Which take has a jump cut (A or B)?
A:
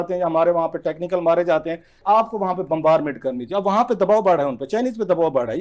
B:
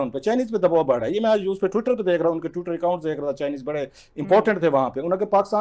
A